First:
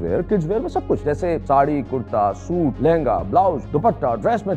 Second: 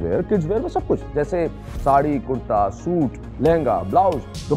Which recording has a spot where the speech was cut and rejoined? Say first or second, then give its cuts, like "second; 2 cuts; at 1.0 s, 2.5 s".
first; 3 cuts; at 1.1 s, 2.8 s, 3.6 s